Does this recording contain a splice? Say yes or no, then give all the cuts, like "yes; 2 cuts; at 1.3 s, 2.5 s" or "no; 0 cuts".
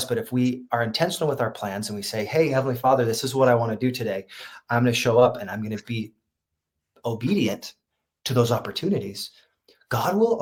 no; 0 cuts